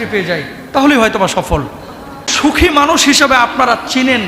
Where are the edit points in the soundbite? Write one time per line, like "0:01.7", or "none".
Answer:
0:02.3